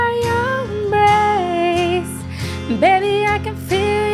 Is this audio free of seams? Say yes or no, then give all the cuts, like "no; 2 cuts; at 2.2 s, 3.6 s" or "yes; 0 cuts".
yes; 0 cuts